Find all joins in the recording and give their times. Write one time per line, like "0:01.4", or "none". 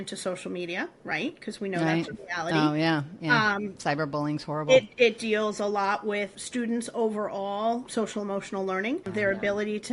0:06.4
0:07.9
0:09.1